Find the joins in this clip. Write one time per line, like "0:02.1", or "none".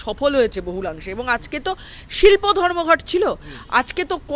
none